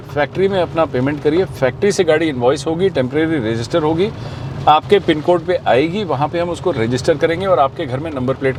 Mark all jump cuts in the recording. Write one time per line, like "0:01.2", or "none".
none